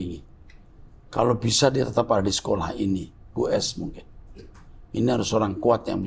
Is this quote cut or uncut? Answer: uncut